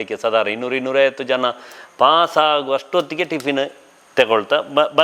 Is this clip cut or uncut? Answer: uncut